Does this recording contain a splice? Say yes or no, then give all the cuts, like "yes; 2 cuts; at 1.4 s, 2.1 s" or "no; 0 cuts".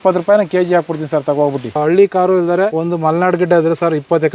yes; 2 cuts; at 1.8 s, 2.7 s